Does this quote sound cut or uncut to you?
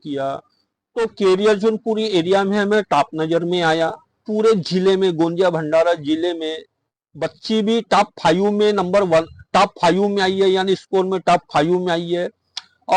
cut